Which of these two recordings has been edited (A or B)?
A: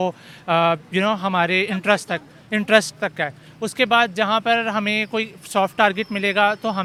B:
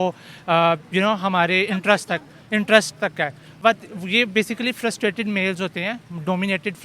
B